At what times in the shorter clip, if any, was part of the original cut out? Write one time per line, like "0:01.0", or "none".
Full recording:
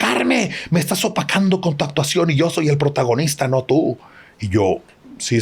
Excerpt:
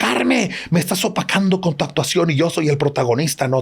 none